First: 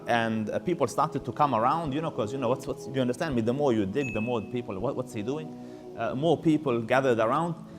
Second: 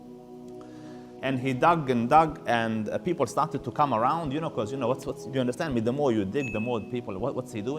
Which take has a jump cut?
second; 1 cut; at 0.9 s

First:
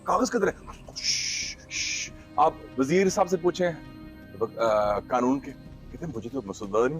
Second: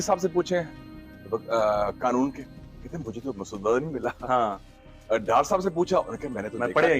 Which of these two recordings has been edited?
first; 1 cut; at 2.2 s

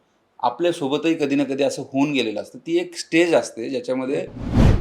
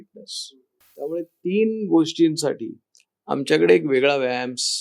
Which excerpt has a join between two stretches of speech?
second; 1 cut; at 1.2 s

